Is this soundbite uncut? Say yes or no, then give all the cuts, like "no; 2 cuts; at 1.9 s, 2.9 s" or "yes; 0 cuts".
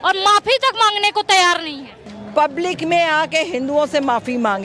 no; 1 cut; at 2.0 s